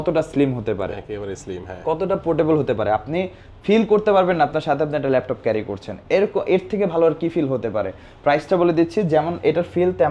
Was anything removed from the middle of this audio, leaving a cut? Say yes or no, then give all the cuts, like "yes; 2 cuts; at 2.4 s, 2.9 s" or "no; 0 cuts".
no; 0 cuts